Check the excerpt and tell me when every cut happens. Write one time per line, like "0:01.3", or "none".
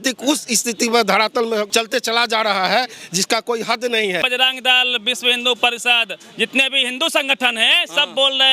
0:01.7
0:04.2